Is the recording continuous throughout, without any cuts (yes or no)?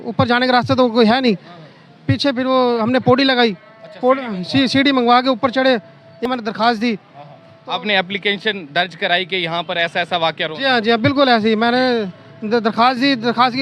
no